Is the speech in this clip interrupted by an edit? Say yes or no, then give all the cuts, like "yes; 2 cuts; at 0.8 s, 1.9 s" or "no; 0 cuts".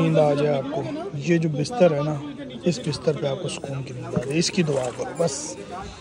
no; 0 cuts